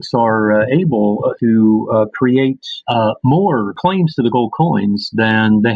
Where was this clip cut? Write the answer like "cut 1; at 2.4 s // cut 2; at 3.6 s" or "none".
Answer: cut 1; at 1.3 s // cut 2; at 2.7 s // cut 3; at 3.8 s